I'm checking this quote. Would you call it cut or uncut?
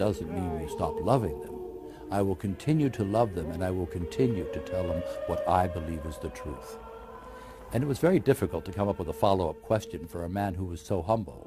cut